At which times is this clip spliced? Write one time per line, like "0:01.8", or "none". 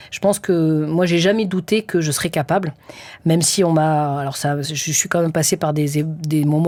none